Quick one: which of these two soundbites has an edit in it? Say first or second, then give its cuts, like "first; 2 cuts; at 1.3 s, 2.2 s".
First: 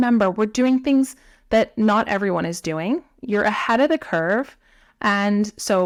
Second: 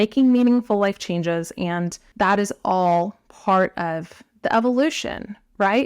second; 1 cut; at 2.0 s